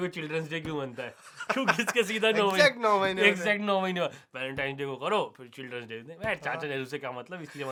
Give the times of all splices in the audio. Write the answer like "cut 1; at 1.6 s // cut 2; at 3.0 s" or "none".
none